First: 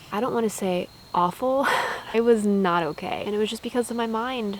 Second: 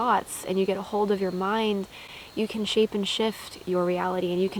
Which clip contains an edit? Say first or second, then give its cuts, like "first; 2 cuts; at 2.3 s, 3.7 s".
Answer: first; 2 cuts; at 2.1 s, 3.2 s